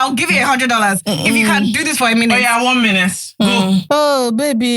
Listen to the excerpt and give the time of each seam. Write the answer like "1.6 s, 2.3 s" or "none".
3.8 s